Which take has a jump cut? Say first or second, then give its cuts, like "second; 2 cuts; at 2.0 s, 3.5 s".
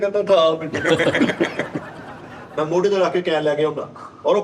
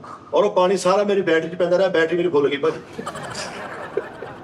first; 1 cut; at 2.4 s